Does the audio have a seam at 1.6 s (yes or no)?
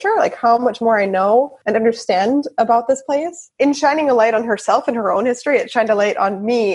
yes